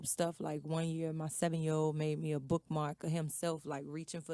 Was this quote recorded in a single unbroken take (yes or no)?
no